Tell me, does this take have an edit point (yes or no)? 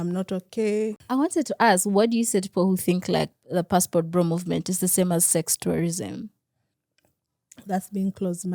yes